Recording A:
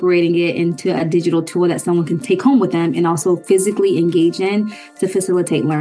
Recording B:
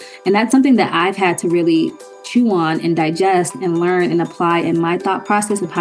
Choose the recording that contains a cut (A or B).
A